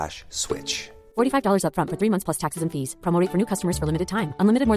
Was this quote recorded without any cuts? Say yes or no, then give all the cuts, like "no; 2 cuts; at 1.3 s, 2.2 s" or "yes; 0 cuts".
yes; 0 cuts